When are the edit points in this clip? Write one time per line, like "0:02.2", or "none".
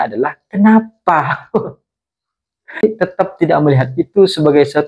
0:02.8